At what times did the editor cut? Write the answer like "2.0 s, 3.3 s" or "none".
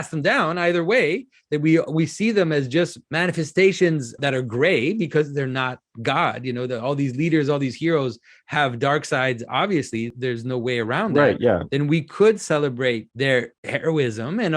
3.0 s, 4.2 s, 10.1 s, 13.4 s